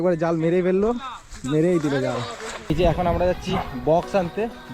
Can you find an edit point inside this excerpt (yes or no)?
yes